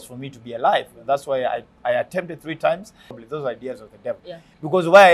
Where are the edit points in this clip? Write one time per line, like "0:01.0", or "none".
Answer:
0:03.3